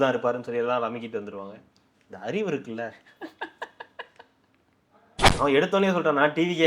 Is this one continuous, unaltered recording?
no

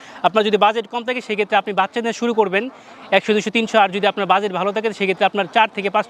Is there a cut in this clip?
no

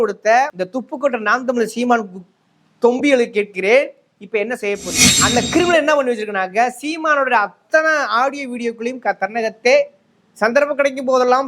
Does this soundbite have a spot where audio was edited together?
yes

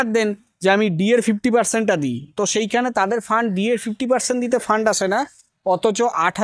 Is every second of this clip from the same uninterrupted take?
yes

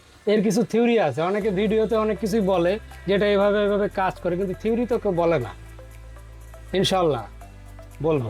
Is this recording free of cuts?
yes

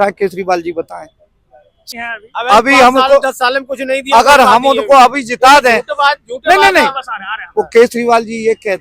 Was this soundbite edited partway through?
no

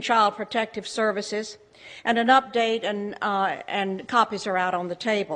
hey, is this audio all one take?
no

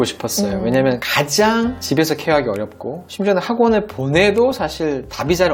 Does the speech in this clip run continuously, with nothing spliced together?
yes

